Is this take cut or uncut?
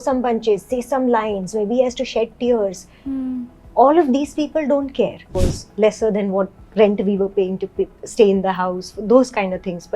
cut